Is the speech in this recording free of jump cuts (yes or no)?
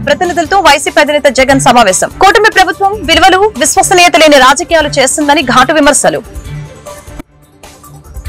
yes